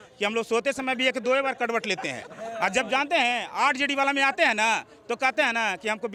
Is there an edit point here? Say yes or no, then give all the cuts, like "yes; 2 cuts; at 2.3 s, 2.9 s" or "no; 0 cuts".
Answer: no; 0 cuts